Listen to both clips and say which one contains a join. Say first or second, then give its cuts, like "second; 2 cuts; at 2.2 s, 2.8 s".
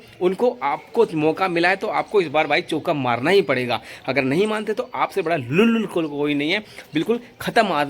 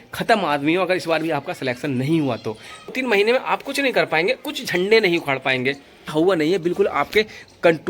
second; 2 cuts; at 2.9 s, 6.0 s